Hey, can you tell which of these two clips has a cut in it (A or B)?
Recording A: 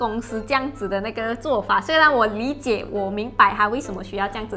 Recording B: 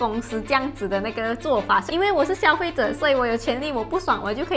B